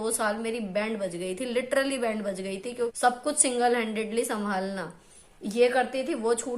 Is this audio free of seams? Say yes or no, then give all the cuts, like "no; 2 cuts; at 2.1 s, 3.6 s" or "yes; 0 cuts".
no; 1 cut; at 2.9 s